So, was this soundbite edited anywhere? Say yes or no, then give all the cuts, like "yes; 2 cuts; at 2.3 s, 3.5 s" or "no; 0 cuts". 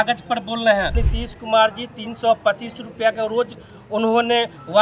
yes; 1 cut; at 1.1 s